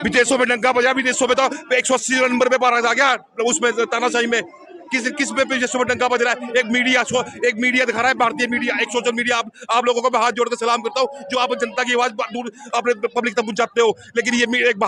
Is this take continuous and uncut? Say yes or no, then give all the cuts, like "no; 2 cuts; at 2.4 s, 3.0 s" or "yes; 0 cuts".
yes; 0 cuts